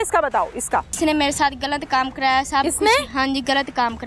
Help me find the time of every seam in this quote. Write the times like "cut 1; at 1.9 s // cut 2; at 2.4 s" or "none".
cut 1; at 0.9 s